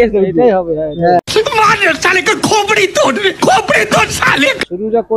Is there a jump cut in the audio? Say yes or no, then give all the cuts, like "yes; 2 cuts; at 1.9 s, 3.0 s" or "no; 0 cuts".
no; 0 cuts